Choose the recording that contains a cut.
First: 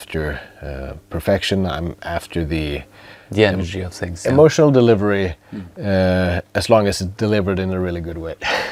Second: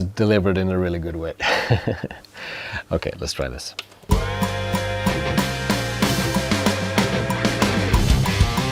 second; 1 cut; at 4.0 s

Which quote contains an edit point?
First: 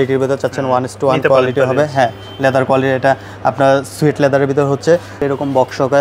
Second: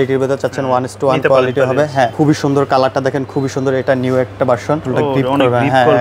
second; 2 cuts; at 2.1 s, 4.9 s

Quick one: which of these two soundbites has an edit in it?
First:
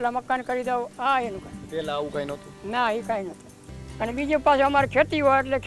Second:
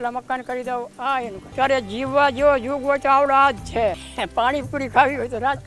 second; 2 cuts; at 1.5 s, 4.1 s

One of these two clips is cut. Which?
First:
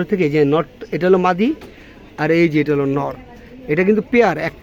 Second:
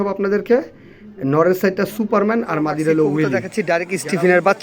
second; 1 cut; at 3.5 s

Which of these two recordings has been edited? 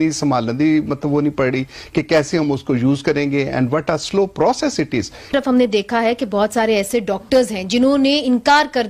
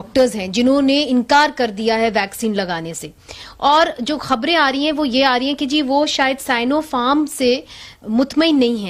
first; 1 cut; at 5.3 s

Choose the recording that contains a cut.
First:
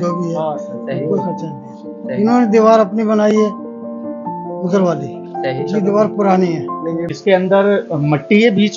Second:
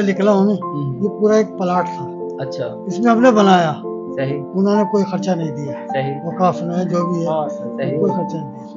first; 1 cut; at 7.1 s

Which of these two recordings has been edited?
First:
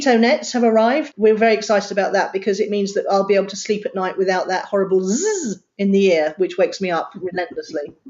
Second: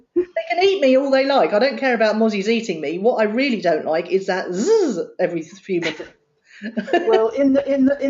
first; 1 cut; at 1.1 s

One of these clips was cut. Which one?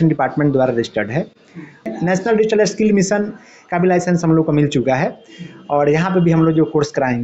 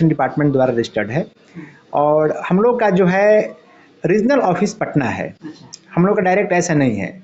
first; 1 cut; at 1.9 s

